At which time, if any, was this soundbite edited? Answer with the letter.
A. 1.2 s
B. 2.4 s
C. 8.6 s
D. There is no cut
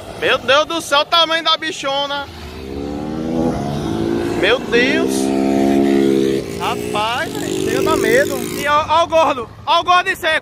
C